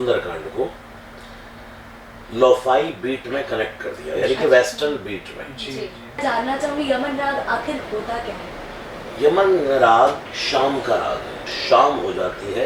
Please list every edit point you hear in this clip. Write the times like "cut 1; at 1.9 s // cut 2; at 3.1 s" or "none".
cut 1; at 6.2 s // cut 2; at 11.5 s